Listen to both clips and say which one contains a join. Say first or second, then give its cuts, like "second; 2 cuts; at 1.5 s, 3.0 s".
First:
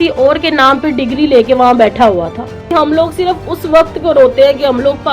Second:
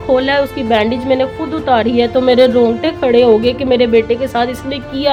first; 1 cut; at 2.7 s